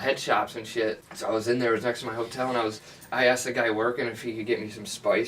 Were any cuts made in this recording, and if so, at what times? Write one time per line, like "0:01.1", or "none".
0:01.1